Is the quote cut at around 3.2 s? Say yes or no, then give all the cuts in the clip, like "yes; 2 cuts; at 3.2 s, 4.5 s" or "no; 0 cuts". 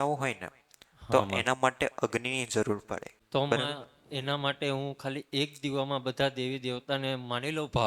yes; 1 cut; at 3.2 s